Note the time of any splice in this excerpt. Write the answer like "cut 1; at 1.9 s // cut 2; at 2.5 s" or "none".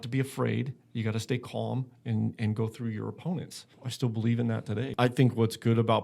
cut 1; at 3.8 s // cut 2; at 4.9 s